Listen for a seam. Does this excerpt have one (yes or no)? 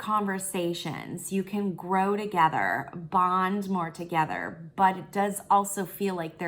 no